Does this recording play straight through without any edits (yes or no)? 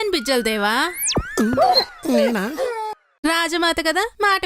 yes